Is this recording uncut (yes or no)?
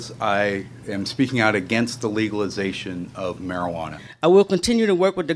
no